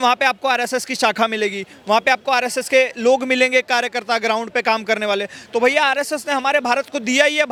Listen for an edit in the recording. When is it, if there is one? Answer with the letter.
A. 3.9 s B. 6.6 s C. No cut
C